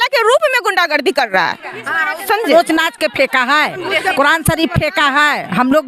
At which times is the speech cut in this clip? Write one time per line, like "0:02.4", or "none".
0:02.5